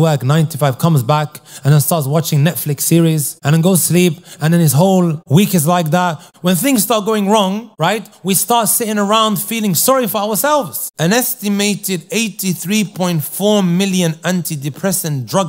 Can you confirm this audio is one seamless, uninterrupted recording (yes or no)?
no